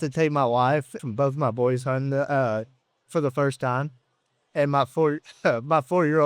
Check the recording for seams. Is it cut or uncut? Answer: cut